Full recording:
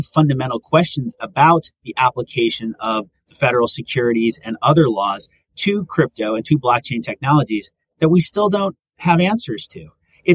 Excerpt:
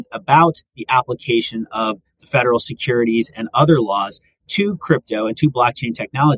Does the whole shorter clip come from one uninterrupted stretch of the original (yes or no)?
yes